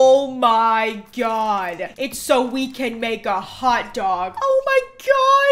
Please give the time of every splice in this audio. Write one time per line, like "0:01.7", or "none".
0:04.3